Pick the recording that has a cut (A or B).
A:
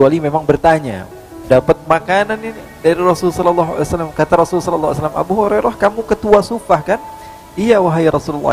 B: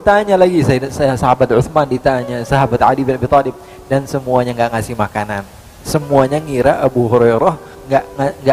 A